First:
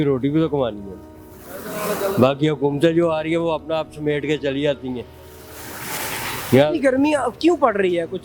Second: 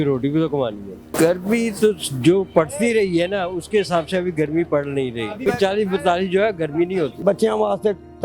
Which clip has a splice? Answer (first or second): second